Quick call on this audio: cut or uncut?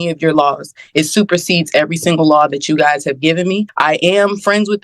cut